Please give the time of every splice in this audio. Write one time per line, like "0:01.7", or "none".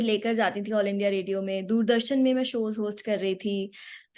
none